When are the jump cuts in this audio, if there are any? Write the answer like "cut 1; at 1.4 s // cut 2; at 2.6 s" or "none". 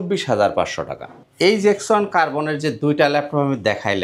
cut 1; at 1.1 s

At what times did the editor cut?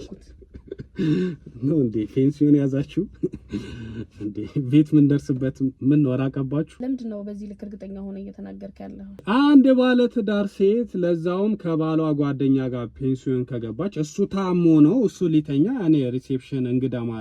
cut 1; at 6.7 s // cut 2; at 9.2 s

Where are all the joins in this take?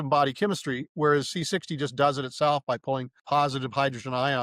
cut 1; at 3.1 s

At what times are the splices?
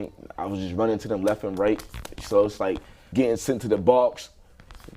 cut 1; at 3.0 s

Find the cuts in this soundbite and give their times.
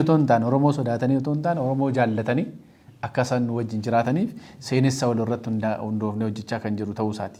none

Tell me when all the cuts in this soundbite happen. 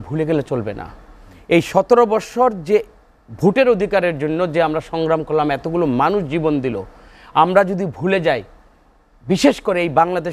none

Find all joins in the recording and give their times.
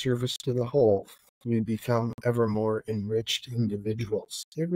none

